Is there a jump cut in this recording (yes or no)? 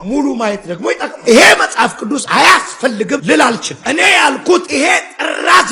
no